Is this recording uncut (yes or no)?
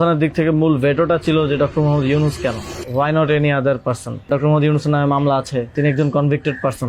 no